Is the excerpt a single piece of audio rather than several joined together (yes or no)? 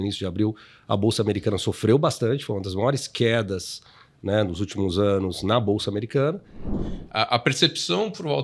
no